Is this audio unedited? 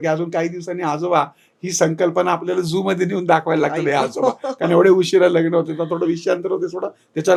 yes; 0 cuts

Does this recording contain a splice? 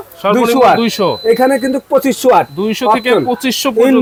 no; 0 cuts

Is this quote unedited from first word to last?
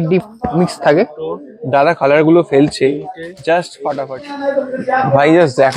no; 1 cut; at 4.1 s

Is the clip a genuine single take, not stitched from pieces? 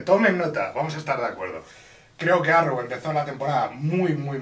no; 1 cut; at 2.6 s

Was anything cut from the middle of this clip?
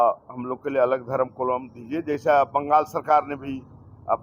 no; 0 cuts

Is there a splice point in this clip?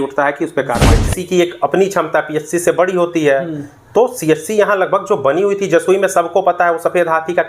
yes; 1 cut; at 1.1 s

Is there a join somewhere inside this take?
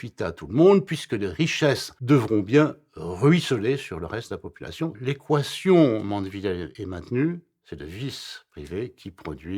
yes; 3 cuts; at 1.9 s, 5.0 s, 6.7 s

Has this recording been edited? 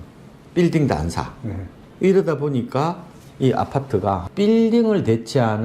yes; 1 cut; at 4.3 s

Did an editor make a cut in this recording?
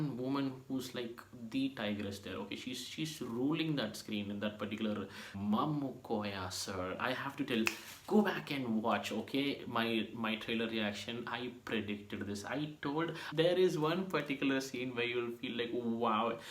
yes; 2 cuts; at 5.3 s, 13.2 s

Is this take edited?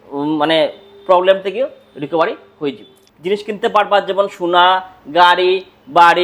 yes; 1 cut; at 3.0 s

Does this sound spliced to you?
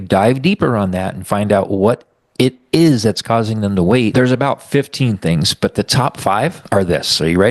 yes; 2 cuts; at 4.1 s, 6.6 s

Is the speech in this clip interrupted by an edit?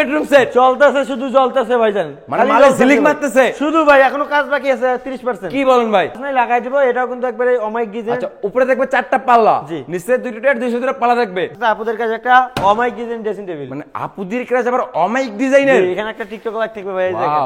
yes; 2 cuts; at 6.2 s, 11.5 s

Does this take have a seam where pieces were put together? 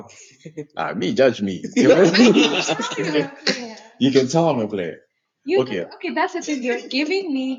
no; 0 cuts

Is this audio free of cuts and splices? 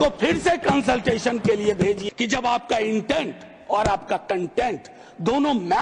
no; 1 cut; at 2.0 s

